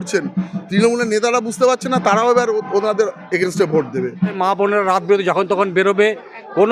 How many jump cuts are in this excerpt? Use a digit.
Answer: 1